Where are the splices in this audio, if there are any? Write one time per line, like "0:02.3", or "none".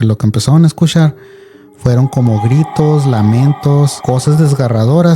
0:04.0